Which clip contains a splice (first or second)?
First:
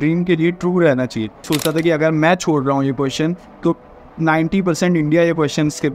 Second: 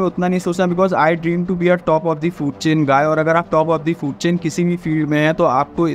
first